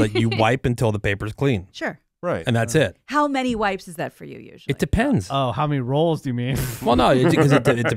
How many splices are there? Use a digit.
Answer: 0